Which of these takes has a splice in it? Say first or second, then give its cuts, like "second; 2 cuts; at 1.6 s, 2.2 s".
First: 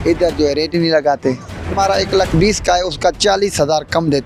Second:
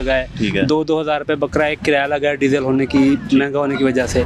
first; 1 cut; at 1.7 s